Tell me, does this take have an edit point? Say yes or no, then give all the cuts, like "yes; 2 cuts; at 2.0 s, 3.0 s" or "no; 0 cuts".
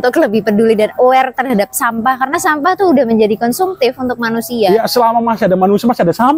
no; 0 cuts